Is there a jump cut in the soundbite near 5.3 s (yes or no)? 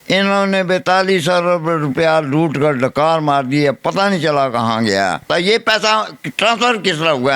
yes